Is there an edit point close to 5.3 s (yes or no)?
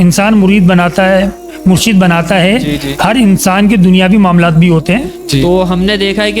yes